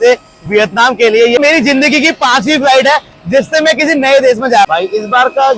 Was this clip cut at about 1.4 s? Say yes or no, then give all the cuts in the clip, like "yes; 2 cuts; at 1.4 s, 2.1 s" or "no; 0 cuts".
yes; 2 cuts; at 1.4 s, 4.7 s